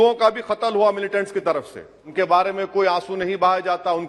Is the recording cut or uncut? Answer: cut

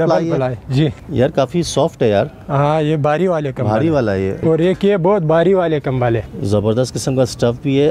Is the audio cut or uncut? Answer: cut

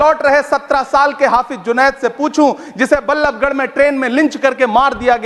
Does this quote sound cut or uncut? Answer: uncut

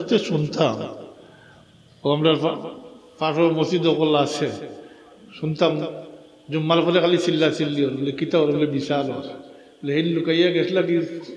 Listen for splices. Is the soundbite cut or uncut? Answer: uncut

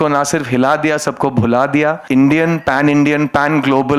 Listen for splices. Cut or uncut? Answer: cut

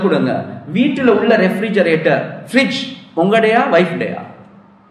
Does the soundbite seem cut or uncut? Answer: uncut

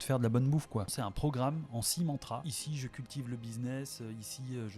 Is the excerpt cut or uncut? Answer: cut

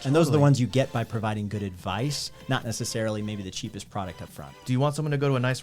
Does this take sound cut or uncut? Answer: cut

